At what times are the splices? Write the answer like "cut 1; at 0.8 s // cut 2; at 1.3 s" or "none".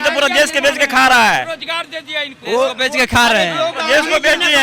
none